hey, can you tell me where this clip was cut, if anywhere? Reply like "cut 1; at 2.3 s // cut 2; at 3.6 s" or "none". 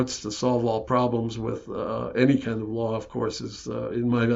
none